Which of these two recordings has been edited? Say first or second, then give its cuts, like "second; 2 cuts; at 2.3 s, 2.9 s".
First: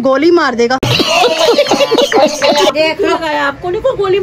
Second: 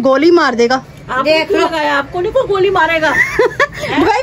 second; 1 cut; at 1.2 s